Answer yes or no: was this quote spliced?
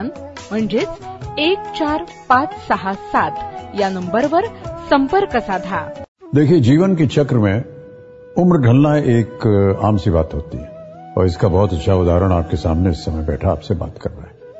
yes